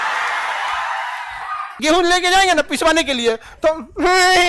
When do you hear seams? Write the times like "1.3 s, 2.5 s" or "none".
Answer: 1.7 s